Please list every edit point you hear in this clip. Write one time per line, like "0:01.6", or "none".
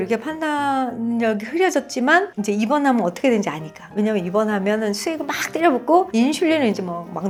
none